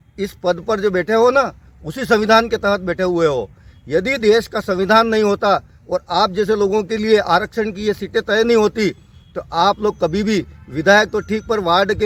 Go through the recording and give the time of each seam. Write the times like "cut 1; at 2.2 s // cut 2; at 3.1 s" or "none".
none